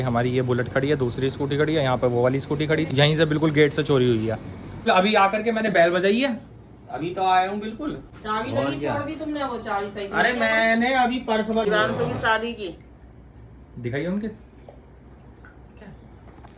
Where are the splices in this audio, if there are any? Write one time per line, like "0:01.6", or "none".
0:02.9
0:04.9
0:08.1
0:11.7